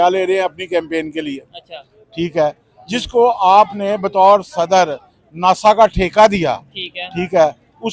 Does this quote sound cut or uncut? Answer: uncut